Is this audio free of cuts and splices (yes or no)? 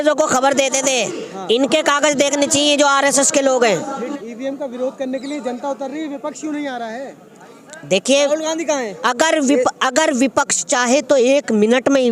no